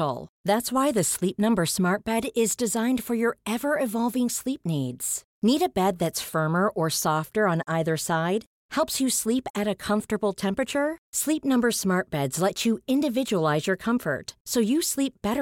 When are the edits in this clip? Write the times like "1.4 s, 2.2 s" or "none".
none